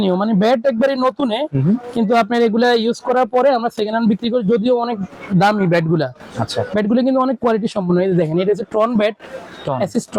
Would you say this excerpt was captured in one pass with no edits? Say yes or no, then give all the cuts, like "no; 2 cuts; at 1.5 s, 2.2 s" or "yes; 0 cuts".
yes; 0 cuts